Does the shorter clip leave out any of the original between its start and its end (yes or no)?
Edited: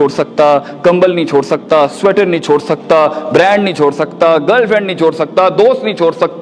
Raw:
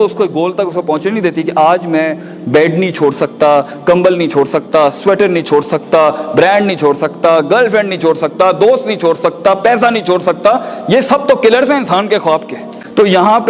no